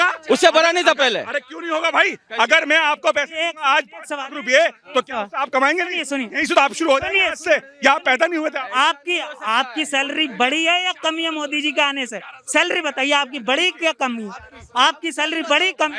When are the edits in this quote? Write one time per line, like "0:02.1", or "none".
none

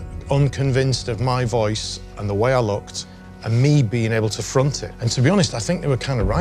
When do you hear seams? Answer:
none

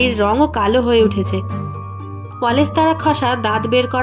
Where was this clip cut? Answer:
none

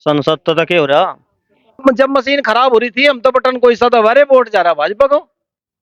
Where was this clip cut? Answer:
0:01.8

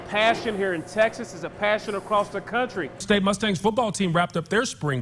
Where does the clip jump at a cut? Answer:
0:03.0

